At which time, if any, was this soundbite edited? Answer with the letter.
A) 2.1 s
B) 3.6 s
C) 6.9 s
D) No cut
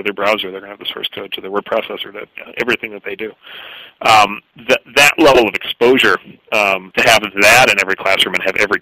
C